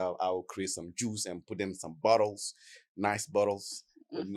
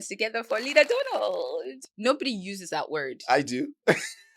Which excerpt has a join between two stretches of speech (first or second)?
second